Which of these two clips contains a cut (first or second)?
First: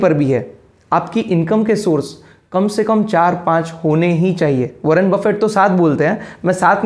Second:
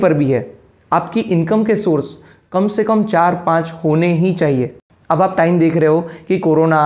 second